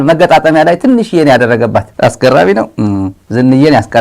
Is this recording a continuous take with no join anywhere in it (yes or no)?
no